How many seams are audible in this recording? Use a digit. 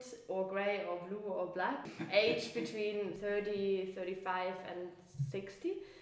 2